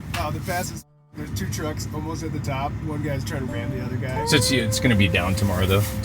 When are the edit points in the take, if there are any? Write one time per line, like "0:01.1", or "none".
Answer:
0:04.2